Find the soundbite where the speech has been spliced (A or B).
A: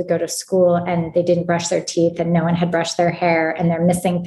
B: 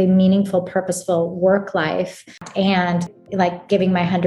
B